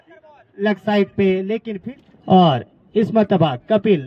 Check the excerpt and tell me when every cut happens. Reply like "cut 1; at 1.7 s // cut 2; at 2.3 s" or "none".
cut 1; at 1.7 s